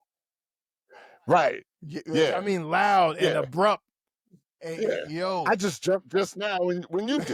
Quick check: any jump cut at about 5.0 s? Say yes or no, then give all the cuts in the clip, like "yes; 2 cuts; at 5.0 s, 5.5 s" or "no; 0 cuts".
no; 0 cuts